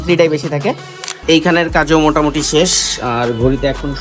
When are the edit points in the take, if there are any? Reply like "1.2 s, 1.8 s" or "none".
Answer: 1.2 s

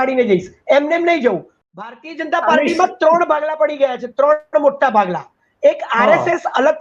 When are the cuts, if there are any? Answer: 1.5 s

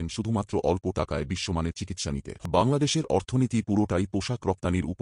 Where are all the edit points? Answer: 2.3 s

